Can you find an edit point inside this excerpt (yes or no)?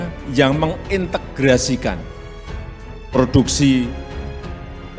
no